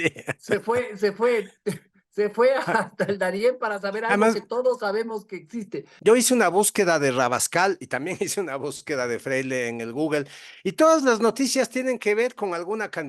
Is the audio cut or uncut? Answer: cut